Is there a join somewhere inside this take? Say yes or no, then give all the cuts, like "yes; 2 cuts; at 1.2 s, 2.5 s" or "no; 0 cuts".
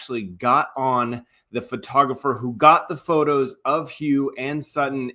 no; 0 cuts